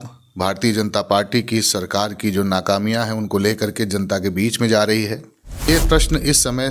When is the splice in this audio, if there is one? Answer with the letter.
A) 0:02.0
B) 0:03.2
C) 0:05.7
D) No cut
C